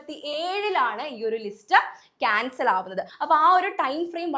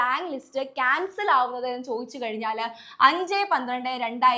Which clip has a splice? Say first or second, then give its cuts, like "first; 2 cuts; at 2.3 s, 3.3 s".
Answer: first; 1 cut; at 3.1 s